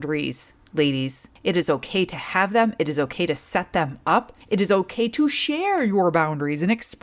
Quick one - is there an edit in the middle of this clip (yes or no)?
yes